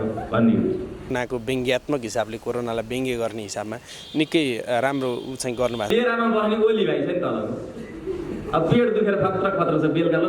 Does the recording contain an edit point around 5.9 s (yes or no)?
yes